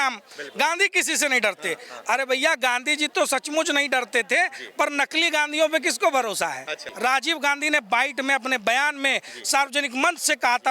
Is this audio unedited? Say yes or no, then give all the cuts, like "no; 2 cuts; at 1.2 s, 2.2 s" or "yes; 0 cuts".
no; 1 cut; at 6.8 s